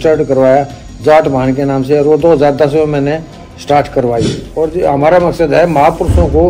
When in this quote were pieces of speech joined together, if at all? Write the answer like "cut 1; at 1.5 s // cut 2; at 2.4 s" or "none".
cut 1; at 4.4 s